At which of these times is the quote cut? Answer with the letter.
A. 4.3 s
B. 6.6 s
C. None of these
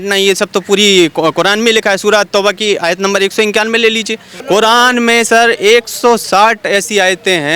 A